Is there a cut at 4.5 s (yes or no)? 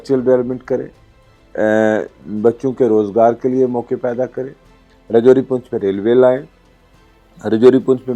no